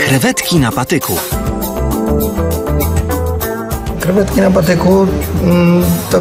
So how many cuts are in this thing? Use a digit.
0